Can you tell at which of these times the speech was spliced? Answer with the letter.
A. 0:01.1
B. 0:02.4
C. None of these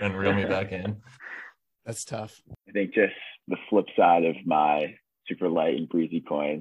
B